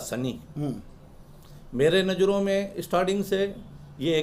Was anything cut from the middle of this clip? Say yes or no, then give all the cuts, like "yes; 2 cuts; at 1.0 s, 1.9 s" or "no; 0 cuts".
no; 0 cuts